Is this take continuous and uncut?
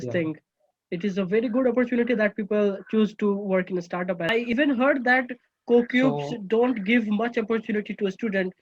no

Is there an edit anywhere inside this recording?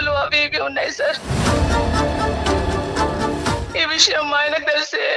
yes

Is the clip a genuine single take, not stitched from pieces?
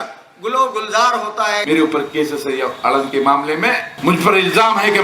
no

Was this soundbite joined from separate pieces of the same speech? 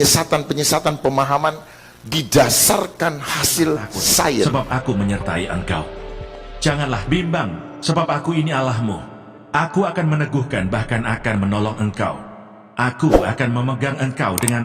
yes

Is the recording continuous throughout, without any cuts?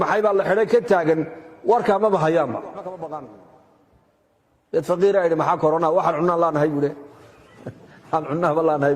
no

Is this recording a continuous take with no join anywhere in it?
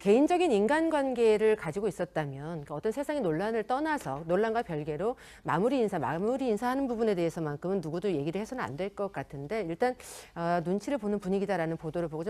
no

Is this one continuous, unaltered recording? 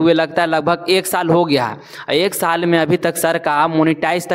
yes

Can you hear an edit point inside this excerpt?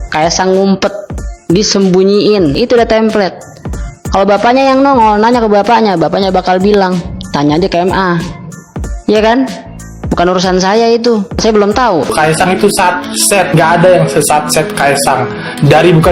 yes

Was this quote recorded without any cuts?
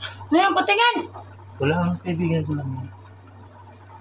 no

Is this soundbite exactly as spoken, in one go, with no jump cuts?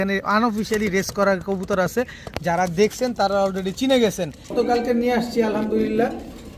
no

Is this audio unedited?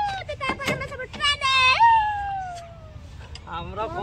yes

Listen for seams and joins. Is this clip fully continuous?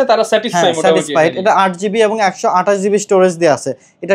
yes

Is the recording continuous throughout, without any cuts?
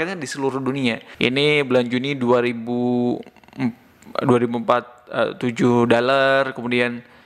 no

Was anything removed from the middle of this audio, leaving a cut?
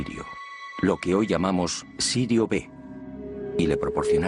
yes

